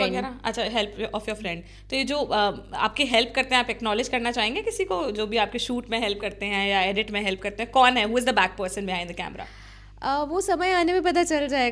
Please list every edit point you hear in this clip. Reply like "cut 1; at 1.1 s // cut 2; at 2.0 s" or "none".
none